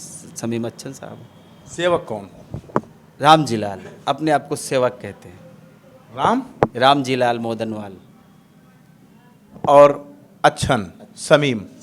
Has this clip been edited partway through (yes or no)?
no